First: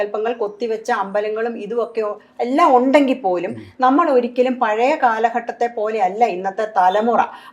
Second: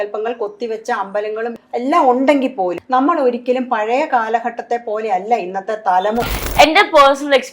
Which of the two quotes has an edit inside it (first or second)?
second